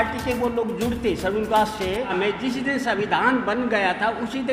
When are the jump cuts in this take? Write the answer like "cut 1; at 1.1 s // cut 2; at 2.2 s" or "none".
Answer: cut 1; at 2.1 s